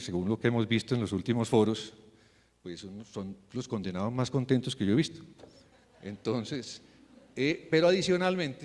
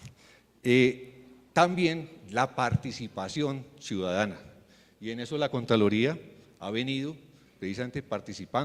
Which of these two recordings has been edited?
first; 1 cut; at 5.4 s

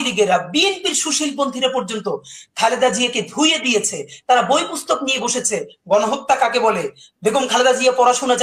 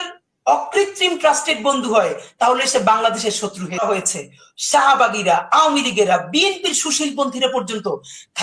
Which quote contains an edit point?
second; 1 cut; at 3.8 s

